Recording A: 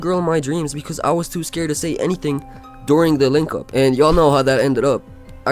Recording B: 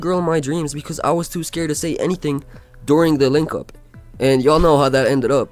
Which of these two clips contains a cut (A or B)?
A